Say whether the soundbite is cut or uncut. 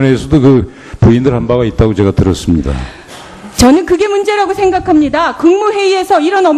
cut